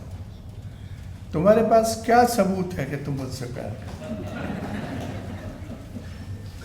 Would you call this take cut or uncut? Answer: uncut